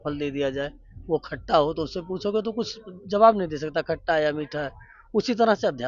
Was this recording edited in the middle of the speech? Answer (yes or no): no